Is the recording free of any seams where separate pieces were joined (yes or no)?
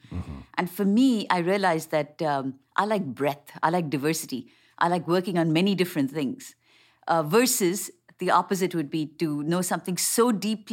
yes